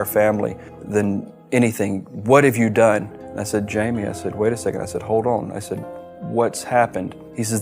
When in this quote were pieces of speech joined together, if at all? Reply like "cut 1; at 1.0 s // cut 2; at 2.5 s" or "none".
none